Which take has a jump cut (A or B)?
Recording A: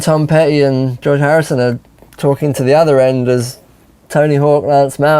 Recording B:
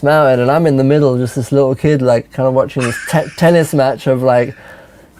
A